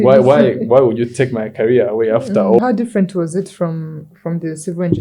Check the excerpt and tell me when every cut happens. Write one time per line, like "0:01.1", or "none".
0:02.6

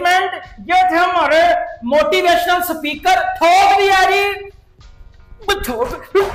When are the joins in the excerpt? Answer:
none

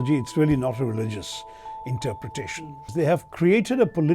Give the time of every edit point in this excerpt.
0:02.8

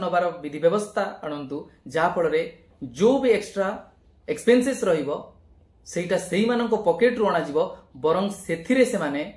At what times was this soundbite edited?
none

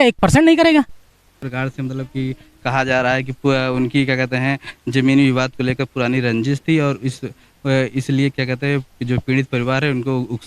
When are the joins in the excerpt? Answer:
0:01.4

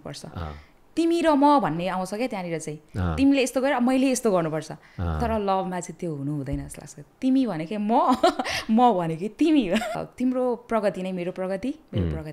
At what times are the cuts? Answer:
0:09.9

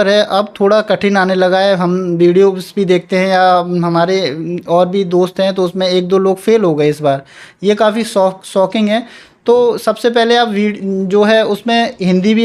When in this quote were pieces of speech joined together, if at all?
none

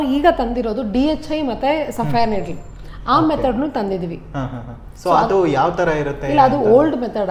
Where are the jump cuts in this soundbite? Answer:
none

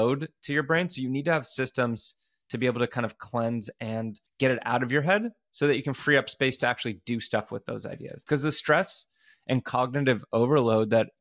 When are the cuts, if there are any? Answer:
0:04.2
0:08.2

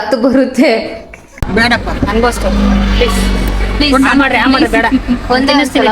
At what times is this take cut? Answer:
0:01.4

